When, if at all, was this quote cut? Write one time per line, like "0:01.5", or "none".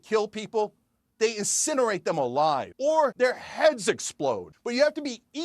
0:03.0
0:04.5